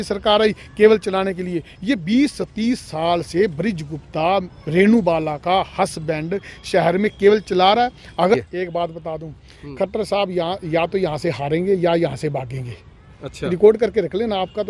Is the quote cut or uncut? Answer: cut